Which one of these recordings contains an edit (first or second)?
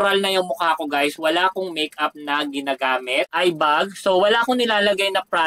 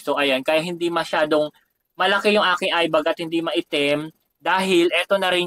first